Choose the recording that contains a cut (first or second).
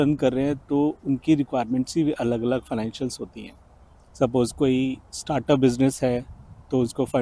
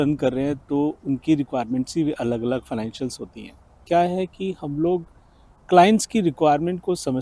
second